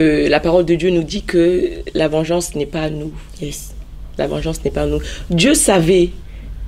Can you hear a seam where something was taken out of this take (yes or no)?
no